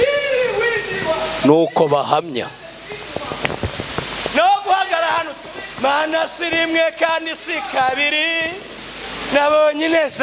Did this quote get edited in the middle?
no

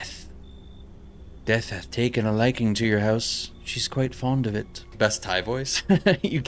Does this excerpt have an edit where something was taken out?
yes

